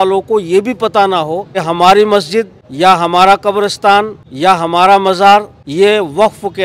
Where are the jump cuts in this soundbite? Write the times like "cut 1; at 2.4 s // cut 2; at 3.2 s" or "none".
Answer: cut 1; at 1.6 s // cut 2; at 2.6 s // cut 3; at 4.2 s // cut 4; at 5.6 s